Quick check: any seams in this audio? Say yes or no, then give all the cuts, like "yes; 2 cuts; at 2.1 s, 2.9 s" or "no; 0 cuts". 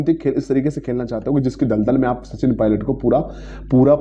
no; 0 cuts